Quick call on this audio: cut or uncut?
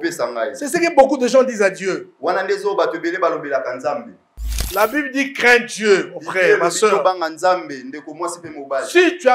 cut